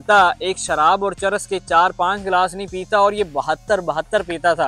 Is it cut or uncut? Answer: uncut